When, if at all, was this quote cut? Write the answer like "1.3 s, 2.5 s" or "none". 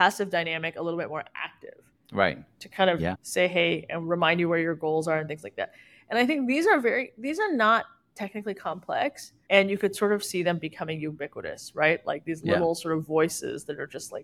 none